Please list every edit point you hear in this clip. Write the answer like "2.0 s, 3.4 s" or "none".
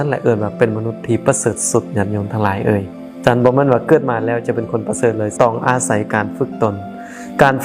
5.3 s

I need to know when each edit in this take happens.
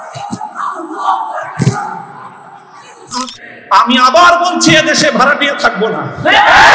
3.2 s

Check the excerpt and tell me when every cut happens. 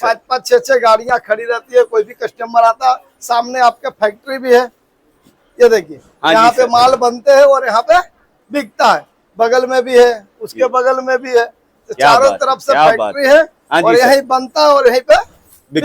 none

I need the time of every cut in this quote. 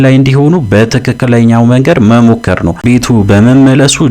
2.8 s

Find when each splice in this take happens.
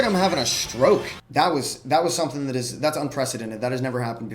1.2 s

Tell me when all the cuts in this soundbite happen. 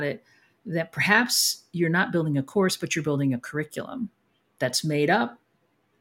none

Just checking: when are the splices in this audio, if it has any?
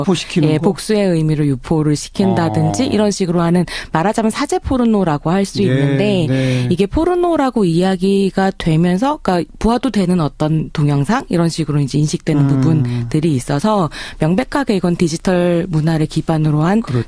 9.3 s

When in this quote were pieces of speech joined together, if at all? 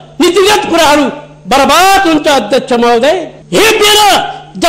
3.3 s

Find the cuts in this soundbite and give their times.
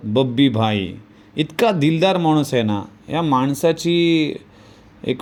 none

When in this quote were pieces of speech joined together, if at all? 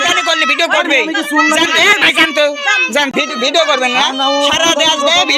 3.1 s

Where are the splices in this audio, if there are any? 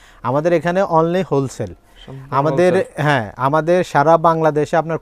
none

